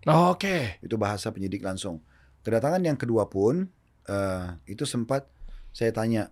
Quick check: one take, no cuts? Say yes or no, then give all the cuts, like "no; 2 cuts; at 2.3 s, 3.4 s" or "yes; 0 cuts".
yes; 0 cuts